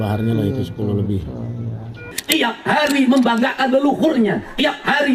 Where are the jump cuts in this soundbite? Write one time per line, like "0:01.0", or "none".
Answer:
0:02.2